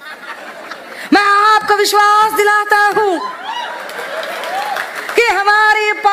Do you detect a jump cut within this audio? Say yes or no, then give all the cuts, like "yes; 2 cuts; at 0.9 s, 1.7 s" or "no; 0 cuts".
no; 0 cuts